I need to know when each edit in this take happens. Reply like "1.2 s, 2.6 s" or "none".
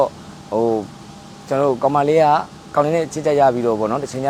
none